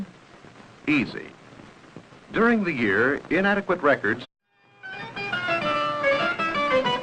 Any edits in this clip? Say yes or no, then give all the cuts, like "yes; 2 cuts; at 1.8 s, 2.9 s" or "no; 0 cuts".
no; 0 cuts